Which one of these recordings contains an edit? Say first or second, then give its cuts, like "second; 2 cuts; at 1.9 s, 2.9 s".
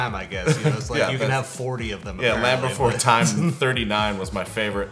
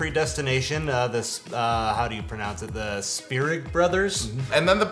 first; 1 cut; at 3.5 s